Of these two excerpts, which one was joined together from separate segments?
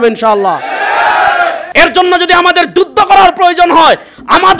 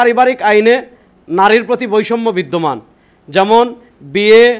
first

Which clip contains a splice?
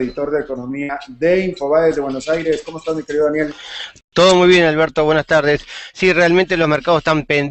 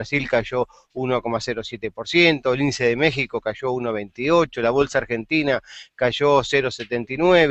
first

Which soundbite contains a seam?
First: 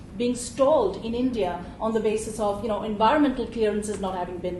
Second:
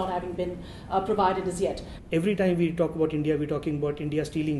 second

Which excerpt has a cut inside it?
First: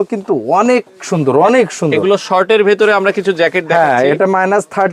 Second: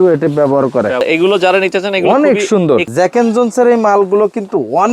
second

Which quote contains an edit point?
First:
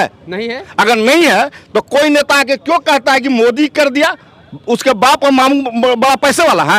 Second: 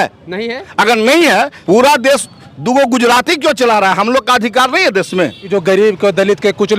second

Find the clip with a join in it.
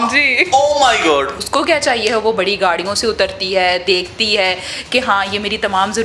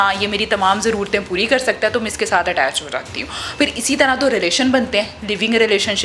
first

